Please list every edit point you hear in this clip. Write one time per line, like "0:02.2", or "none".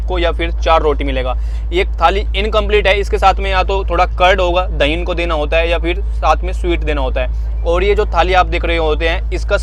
none